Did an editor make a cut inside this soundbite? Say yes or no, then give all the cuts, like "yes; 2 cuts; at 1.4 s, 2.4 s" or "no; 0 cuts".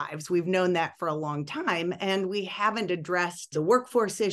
yes; 1 cut; at 3.4 s